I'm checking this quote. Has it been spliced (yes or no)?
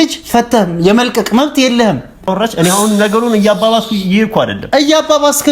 yes